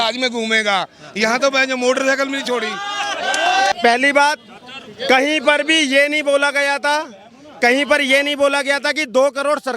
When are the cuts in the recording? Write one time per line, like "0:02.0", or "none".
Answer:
0:03.7